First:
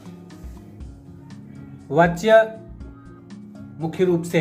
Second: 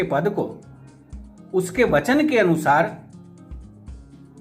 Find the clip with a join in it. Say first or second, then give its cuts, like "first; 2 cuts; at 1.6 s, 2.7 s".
first; 1 cut; at 1.9 s